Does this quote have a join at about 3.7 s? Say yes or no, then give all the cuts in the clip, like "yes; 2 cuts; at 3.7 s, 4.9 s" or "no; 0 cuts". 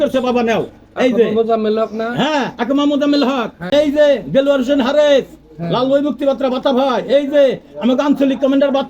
yes; 1 cut; at 3.7 s